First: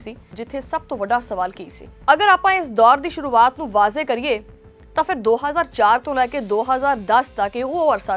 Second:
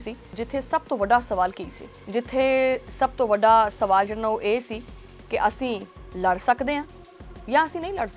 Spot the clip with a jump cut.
first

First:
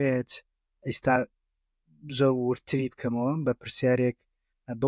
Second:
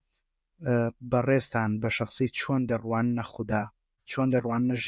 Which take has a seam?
second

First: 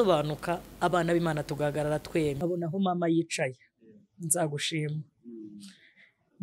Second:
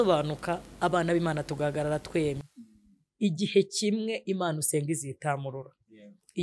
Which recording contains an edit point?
first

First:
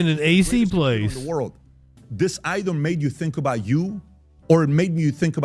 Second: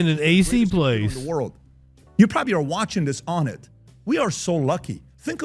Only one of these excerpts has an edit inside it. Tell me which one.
first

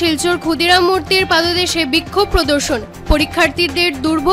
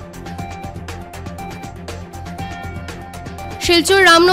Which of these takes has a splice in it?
second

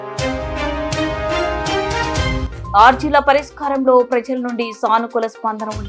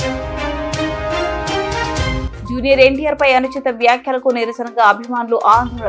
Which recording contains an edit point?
second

